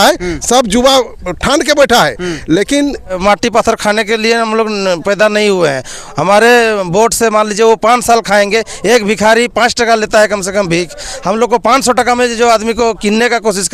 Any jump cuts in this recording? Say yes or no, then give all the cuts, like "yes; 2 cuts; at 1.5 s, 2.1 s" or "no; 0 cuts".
yes; 1 cut; at 3.2 s